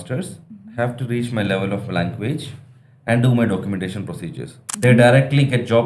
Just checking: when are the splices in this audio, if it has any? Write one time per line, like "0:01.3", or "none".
0:04.6